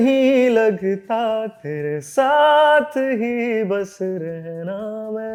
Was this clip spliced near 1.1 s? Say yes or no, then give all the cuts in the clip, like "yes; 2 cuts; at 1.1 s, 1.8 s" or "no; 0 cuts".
no; 0 cuts